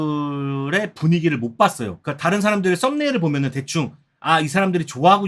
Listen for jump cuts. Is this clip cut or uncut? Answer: cut